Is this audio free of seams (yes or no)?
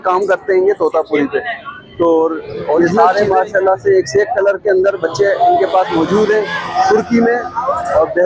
no